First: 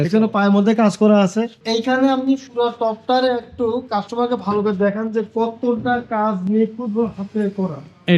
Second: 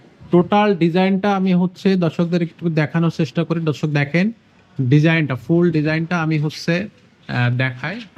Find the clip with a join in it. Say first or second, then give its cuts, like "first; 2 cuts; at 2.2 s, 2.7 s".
first; 1 cut; at 1.6 s